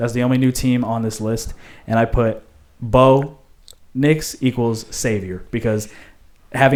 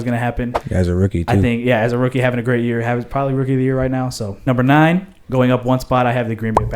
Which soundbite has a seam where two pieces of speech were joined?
second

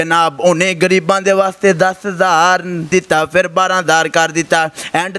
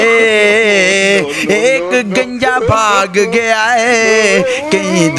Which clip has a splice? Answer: first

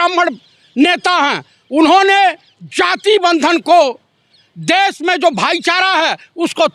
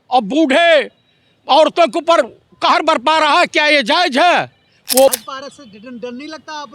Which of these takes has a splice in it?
second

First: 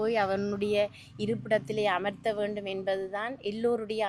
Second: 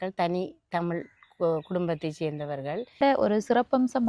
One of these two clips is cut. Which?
second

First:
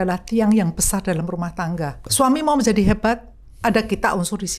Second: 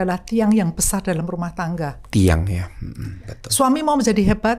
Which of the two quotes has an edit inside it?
first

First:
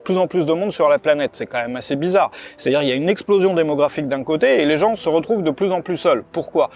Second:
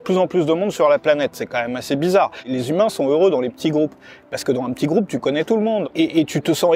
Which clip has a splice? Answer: second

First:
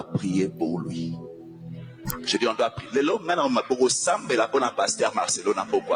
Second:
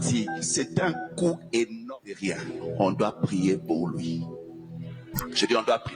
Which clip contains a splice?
second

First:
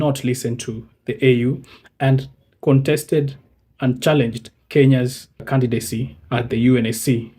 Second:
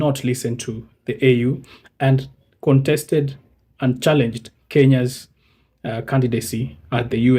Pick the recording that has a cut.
first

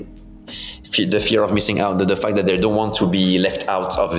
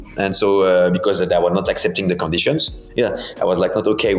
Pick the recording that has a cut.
second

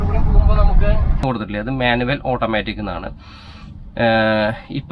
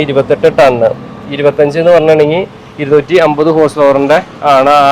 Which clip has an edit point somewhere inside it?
first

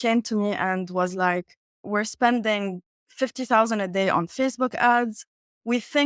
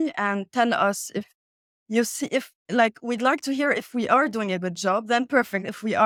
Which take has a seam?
first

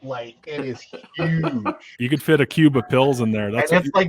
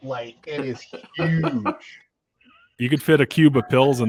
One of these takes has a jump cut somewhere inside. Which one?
first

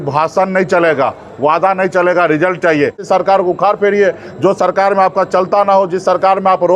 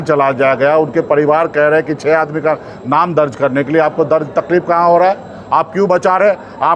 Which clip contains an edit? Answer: first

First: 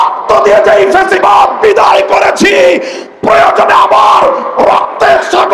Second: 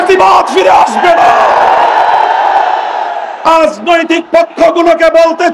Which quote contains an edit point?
second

